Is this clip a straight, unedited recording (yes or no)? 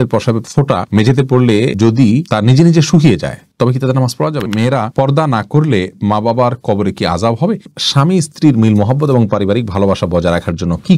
no